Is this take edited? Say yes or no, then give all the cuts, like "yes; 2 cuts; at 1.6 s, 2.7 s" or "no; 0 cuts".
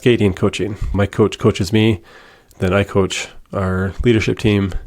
yes; 1 cut; at 0.9 s